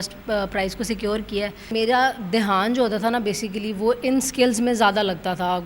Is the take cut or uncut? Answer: cut